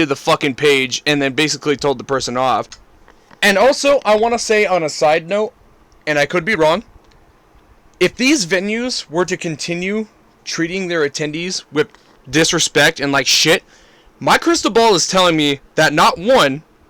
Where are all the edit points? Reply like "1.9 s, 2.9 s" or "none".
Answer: 2.8 s